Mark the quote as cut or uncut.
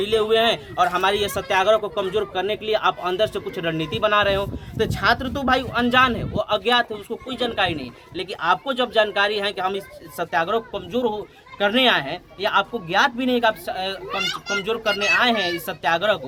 uncut